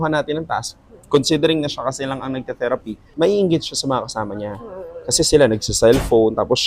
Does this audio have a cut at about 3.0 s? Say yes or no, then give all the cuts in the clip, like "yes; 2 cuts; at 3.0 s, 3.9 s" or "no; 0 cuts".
yes; 1 cut; at 3.0 s